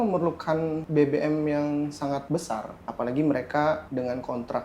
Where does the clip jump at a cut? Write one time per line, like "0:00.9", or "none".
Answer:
0:00.8
0:02.4
0:03.9